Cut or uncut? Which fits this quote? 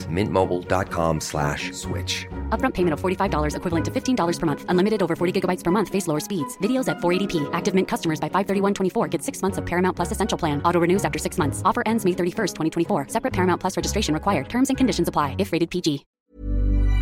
cut